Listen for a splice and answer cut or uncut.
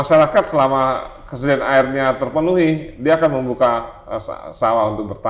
uncut